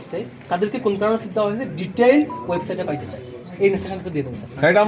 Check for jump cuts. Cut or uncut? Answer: uncut